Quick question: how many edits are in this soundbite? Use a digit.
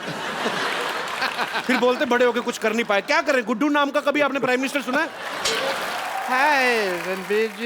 1